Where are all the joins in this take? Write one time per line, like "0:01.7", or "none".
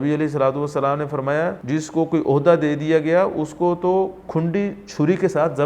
0:01.6